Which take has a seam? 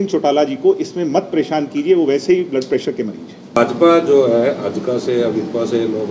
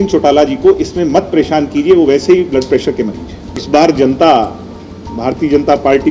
second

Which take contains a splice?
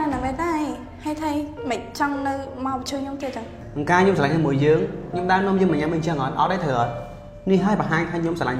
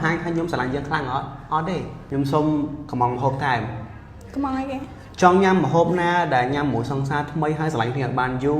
second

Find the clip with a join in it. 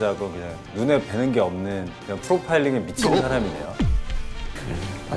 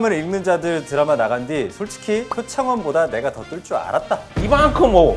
second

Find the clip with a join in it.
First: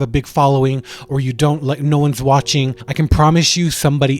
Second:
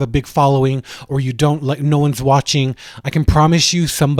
first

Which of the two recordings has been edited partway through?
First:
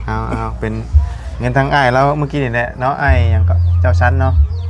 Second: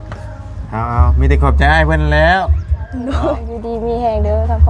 second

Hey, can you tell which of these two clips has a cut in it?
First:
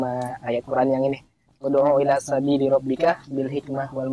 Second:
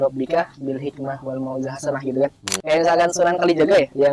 second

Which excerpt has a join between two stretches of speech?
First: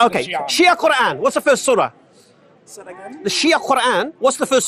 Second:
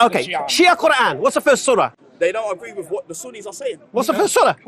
second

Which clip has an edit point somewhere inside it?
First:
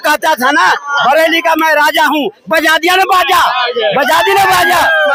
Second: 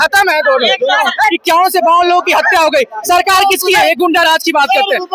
second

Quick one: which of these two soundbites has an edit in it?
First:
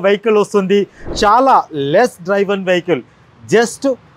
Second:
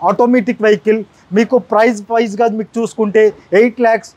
first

